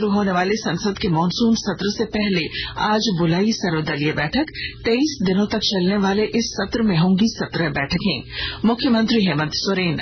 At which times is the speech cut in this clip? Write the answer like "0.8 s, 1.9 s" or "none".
none

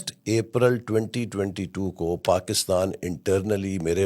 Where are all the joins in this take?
none

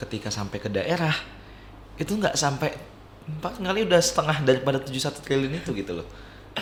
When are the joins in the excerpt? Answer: none

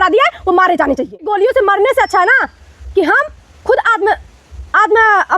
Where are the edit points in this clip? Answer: 1.3 s

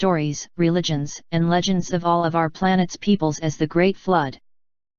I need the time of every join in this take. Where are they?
none

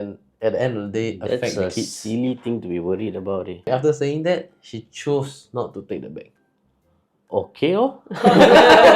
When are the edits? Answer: 3.7 s

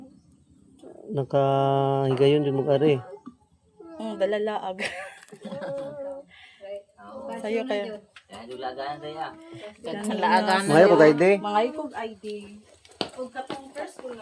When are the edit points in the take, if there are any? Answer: none

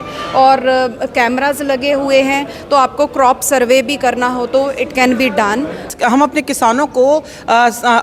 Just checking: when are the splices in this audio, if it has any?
5.8 s

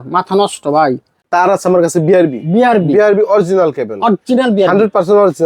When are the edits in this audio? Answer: 1.2 s

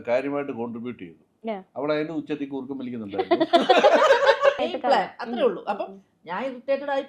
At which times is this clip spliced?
4.6 s

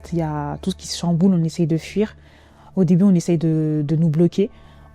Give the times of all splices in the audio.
none

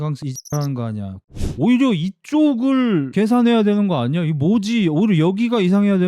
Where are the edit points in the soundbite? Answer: 1.2 s

